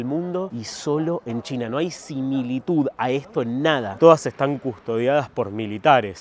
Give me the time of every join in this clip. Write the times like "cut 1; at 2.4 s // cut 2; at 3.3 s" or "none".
cut 1; at 3.9 s